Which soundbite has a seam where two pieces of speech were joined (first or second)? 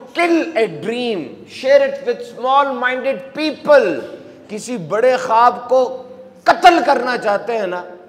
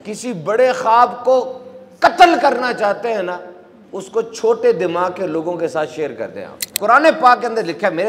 second